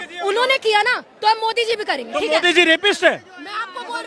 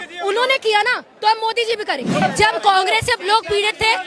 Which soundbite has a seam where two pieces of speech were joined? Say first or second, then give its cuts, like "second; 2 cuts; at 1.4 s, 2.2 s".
second; 1 cut; at 2.2 s